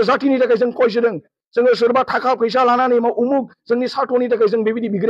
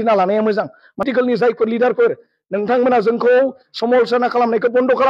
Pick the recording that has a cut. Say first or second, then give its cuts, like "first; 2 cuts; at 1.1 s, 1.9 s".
second; 1 cut; at 1.0 s